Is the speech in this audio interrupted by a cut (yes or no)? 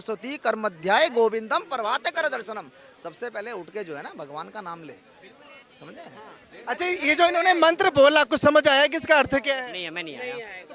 no